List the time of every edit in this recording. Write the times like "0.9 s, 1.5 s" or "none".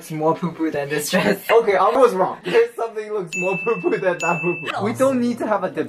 1.5 s, 2.4 s, 4.7 s